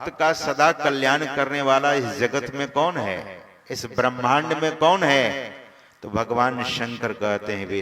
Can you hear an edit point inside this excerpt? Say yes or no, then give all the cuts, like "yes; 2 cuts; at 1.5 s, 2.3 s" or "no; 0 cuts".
no; 0 cuts